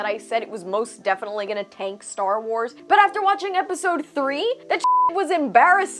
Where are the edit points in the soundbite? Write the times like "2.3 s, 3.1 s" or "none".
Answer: 2.8 s, 5.1 s

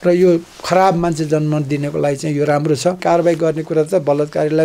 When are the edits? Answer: 3.0 s

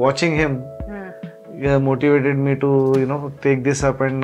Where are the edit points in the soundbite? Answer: none

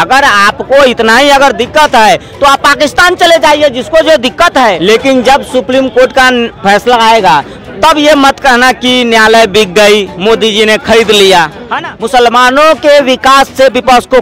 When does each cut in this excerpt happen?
4.8 s, 11.6 s

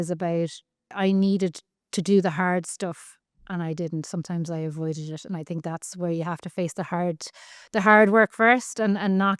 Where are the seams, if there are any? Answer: 0.9 s

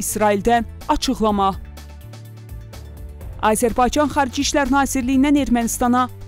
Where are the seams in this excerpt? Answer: none

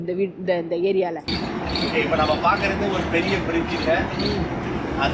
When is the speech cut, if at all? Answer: 1.3 s

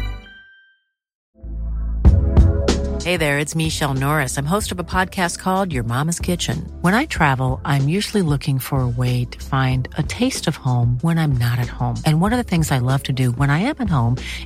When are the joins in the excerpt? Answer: 1.2 s

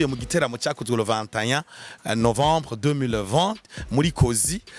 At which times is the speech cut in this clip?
none

